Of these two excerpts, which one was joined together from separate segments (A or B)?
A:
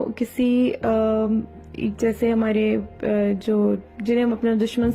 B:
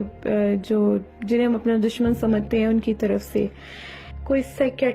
B